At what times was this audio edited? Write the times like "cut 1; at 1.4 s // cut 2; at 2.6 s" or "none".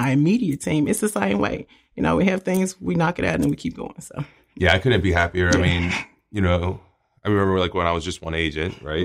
none